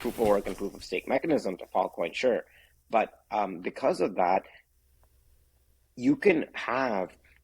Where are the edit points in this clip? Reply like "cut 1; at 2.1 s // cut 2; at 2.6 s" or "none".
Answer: none